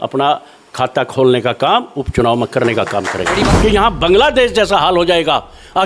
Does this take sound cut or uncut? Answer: cut